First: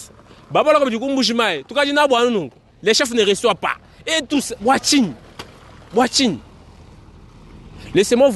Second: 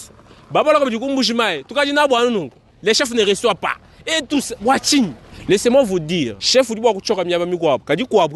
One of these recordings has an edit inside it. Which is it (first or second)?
second